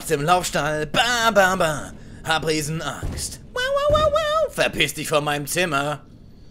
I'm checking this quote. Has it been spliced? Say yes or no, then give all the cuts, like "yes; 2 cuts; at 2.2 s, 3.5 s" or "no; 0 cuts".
no; 0 cuts